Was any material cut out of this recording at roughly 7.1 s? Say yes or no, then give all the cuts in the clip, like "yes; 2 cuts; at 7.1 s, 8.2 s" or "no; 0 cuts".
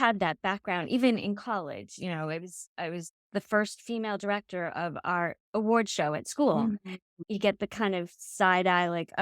yes; 1 cut; at 7.1 s